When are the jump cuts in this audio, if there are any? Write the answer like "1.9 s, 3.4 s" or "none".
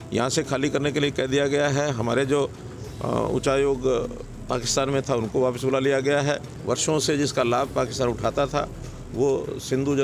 6.5 s